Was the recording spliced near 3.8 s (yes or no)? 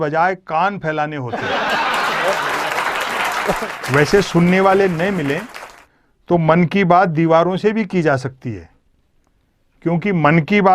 yes